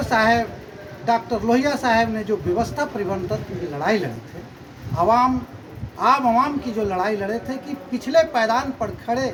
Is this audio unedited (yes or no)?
yes